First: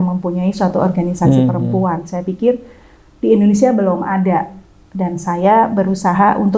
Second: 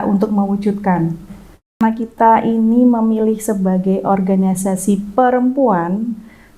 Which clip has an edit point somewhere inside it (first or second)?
second